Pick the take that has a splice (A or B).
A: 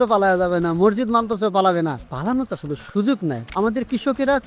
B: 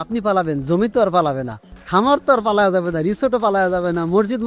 A